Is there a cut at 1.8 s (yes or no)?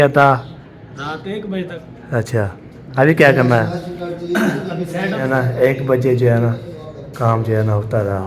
yes